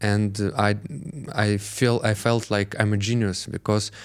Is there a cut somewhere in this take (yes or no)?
no